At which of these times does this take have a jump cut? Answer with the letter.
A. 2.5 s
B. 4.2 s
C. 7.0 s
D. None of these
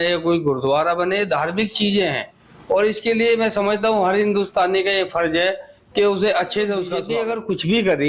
C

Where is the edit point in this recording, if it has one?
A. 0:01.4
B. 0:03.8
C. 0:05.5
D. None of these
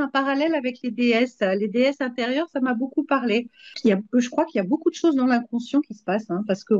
B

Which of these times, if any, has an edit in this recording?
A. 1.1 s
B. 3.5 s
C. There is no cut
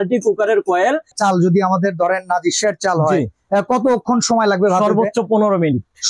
A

